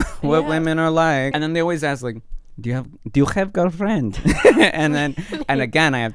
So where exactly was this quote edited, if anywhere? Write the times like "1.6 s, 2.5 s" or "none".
1.3 s